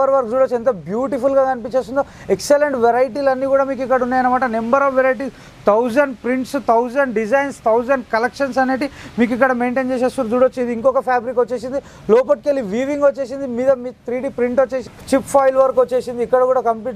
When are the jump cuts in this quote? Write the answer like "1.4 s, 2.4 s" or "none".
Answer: 14.9 s

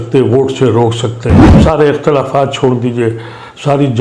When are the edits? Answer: 1.5 s

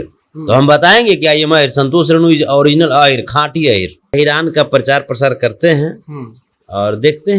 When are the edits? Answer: 4.1 s

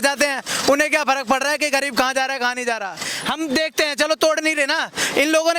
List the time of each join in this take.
3.1 s

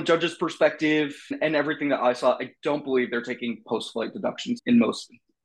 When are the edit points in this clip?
1.3 s, 4.6 s

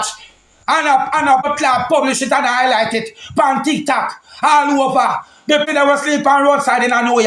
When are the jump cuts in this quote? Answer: 1.5 s, 5.7 s

